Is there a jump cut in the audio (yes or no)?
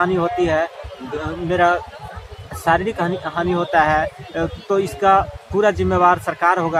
no